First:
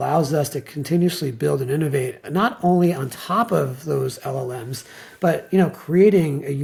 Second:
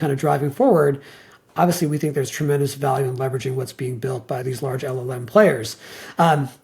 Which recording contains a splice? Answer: second; 1 cut; at 4.4 s

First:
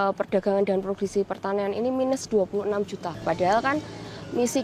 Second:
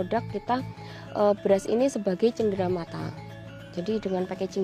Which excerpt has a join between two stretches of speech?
first; 1 cut; at 3.2 s

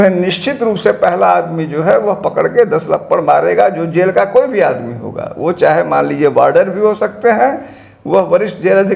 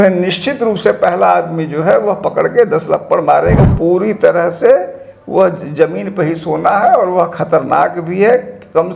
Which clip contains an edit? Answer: second; 1 cut; at 3.6 s

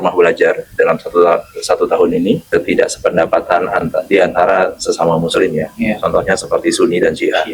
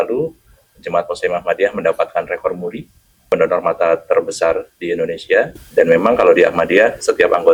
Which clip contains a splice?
first; 1 cut; at 2.4 s

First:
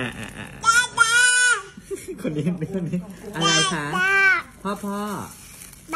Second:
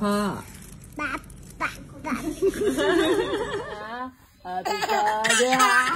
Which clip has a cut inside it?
second; 1 cut; at 3.8 s

